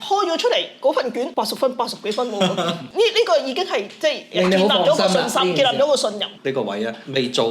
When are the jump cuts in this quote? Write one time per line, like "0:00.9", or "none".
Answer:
0:01.3
0:02.8
0:06.3